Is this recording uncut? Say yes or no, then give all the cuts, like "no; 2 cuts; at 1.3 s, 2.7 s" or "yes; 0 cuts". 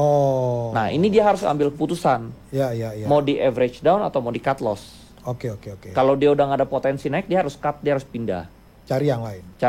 yes; 0 cuts